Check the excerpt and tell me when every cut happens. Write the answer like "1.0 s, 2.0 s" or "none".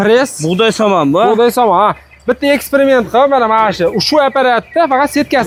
none